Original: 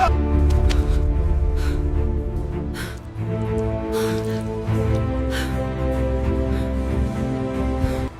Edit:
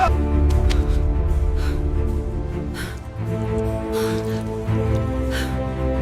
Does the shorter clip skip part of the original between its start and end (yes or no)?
no